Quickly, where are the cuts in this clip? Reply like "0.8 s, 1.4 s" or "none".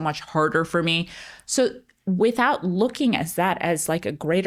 none